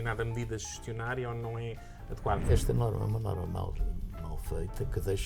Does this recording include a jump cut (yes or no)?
yes